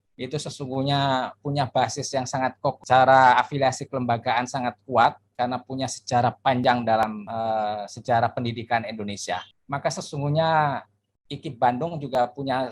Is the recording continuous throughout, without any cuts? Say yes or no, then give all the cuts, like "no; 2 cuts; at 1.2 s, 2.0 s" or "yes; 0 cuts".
no; 3 cuts; at 2.8 s, 7.2 s, 9.5 s